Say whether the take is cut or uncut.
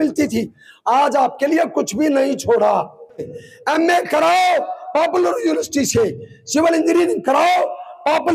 cut